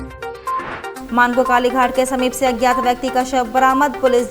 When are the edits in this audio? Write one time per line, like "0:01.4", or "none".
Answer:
0:01.0